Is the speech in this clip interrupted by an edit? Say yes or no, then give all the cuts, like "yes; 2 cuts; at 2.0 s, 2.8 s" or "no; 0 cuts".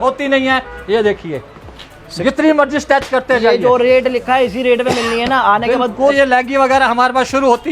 yes; 1 cut; at 6.1 s